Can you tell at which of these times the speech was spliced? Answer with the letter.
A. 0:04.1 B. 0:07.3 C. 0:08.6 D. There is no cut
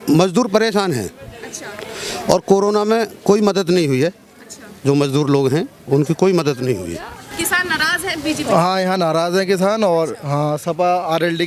B